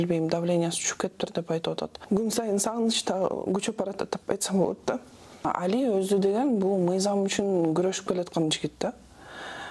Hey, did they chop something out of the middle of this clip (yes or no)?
yes